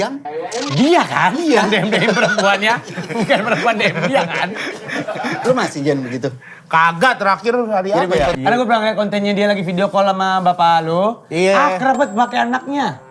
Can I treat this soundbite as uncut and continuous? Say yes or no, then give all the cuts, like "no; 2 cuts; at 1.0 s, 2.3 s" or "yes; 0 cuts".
no; 1 cut; at 8.3 s